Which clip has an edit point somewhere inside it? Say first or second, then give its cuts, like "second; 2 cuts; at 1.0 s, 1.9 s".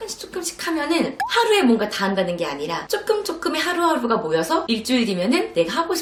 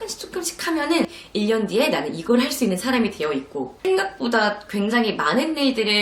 second; 2 cuts; at 1.1 s, 3.7 s